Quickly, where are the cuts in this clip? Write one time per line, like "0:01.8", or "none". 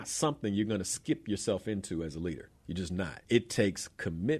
0:03.2